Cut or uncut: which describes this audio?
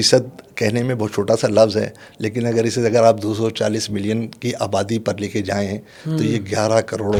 uncut